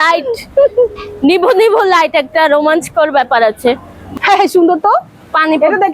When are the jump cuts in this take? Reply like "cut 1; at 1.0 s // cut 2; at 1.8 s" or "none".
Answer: cut 1; at 4.0 s